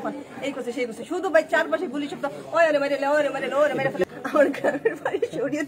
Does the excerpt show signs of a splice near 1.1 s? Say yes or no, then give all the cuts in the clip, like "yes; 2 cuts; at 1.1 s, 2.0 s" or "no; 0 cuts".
no; 1 cut; at 4.0 s